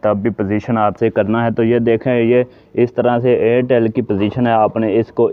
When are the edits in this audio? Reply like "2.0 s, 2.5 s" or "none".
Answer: 1.0 s